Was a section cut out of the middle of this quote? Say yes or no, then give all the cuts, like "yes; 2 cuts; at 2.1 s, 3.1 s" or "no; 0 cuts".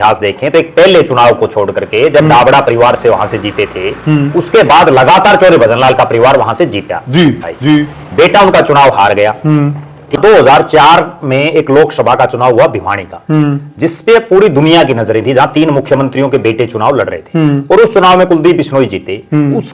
yes; 2 cuts; at 7.4 s, 10.2 s